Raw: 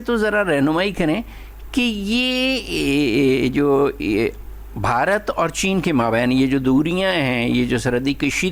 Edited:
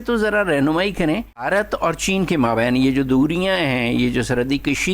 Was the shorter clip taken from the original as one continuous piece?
no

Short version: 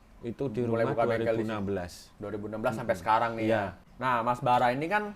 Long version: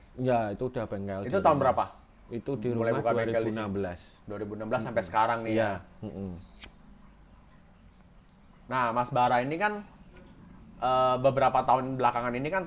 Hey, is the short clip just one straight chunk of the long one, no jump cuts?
no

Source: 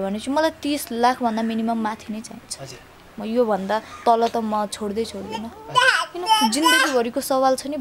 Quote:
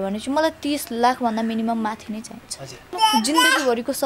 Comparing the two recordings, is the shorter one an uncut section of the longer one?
no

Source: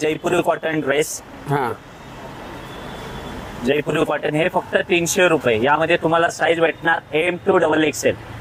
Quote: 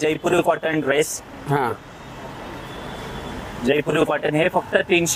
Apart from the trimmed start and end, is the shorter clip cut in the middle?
no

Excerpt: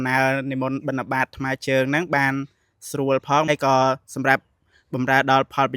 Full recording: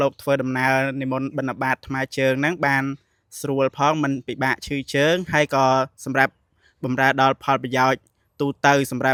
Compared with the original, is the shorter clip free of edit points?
no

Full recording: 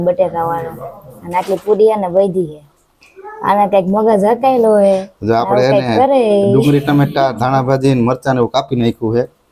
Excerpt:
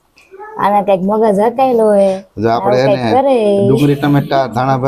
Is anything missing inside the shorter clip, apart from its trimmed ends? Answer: no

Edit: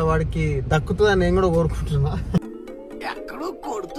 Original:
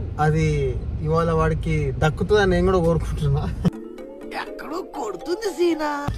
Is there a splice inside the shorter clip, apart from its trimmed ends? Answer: no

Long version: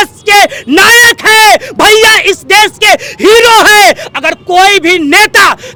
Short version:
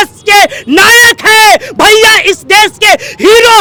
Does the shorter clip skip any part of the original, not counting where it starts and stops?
no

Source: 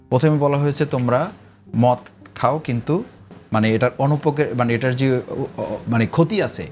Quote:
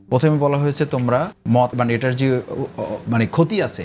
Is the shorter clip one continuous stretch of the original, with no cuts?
no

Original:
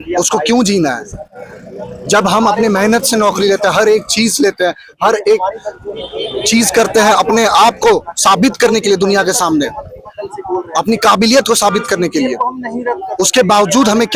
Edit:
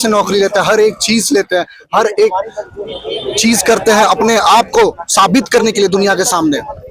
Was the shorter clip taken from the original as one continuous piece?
yes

